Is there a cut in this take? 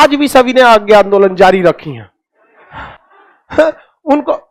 no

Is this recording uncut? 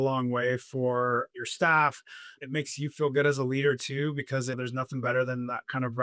yes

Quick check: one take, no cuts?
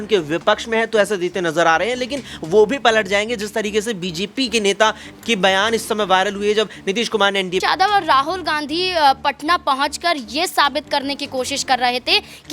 no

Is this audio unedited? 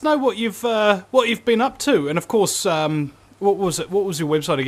yes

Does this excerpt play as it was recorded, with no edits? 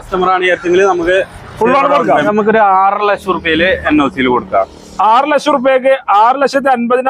no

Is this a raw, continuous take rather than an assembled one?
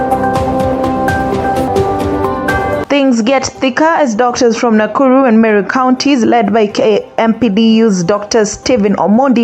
no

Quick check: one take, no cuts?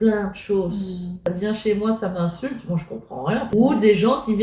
no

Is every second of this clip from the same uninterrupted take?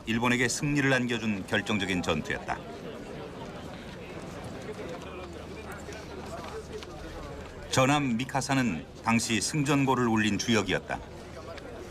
no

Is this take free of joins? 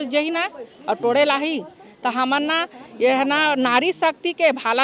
yes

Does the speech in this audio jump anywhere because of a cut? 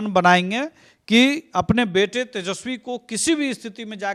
no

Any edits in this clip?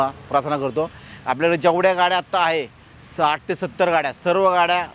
no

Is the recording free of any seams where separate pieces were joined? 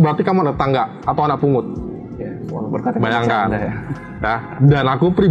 yes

